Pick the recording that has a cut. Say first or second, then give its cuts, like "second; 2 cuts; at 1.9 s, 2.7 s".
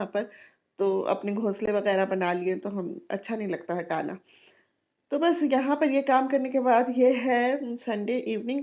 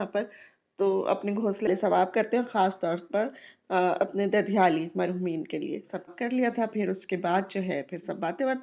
second; 2 cuts; at 1.7 s, 6.1 s